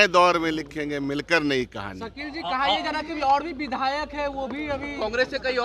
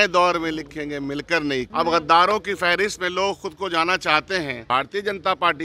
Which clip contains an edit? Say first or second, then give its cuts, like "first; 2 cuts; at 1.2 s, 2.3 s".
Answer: second; 2 cuts; at 1.7 s, 4.6 s